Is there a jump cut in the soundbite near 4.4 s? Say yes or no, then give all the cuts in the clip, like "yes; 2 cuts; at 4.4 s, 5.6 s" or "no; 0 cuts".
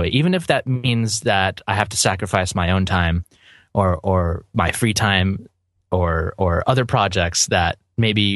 yes; 1 cut; at 4.4 s